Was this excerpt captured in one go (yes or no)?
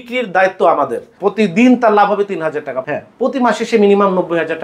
no